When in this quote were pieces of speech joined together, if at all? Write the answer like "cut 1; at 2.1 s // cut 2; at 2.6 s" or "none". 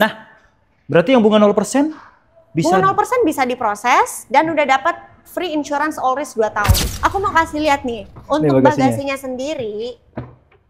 cut 1; at 6.9 s